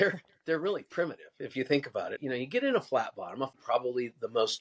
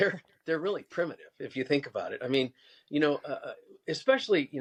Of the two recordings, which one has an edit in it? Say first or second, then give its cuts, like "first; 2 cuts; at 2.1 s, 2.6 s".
first; 2 cuts; at 2.2 s, 3.5 s